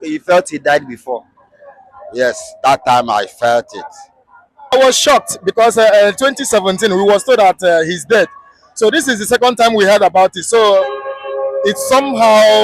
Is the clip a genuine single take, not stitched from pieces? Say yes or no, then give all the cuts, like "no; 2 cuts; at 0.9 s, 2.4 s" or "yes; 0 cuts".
no; 1 cut; at 4.7 s